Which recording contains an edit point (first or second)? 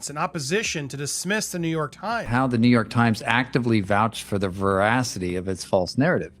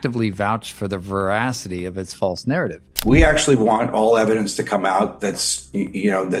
first